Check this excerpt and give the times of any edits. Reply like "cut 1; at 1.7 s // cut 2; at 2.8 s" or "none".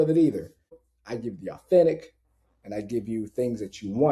cut 1; at 1.0 s

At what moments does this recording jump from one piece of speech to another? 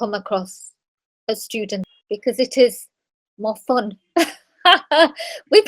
cut 1; at 1.9 s

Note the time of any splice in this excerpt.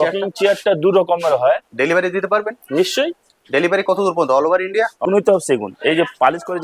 cut 1; at 1.6 s // cut 2; at 5.0 s

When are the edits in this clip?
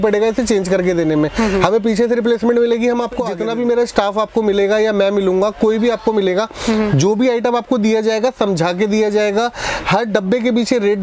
cut 1; at 3.3 s

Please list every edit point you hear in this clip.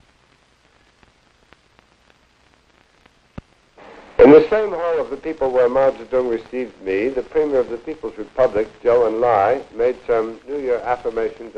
cut 1; at 2.1 s

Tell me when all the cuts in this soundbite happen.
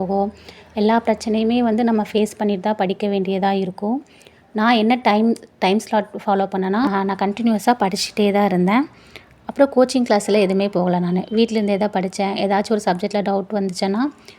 cut 1; at 6.9 s

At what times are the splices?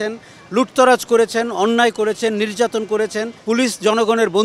cut 1; at 3.3 s

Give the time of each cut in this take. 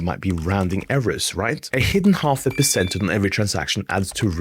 cut 1; at 1.7 s

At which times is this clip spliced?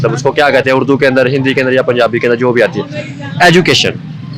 none

